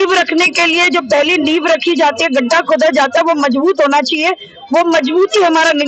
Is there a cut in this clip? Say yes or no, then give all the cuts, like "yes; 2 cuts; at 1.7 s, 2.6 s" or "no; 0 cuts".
no; 0 cuts